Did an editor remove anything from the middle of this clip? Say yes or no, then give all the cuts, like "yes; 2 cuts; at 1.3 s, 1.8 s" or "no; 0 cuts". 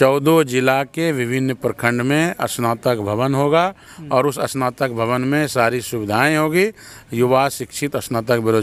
no; 0 cuts